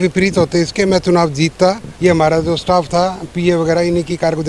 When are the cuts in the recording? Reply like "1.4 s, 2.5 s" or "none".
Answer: 1.9 s